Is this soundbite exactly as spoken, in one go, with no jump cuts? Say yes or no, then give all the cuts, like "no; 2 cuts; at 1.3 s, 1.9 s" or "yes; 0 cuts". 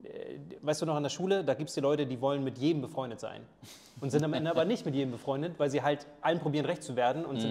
yes; 0 cuts